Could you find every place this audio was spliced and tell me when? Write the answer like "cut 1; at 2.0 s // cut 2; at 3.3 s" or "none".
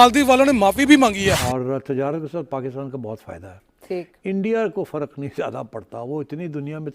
cut 1; at 1.5 s